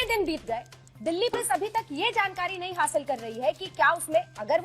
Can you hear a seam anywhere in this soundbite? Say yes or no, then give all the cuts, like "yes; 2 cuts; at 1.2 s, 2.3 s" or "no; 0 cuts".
yes; 1 cut; at 1.3 s